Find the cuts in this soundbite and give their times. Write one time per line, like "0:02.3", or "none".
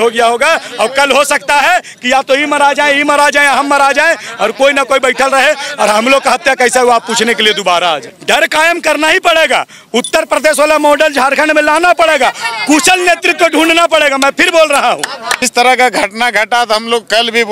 0:08.1
0:15.4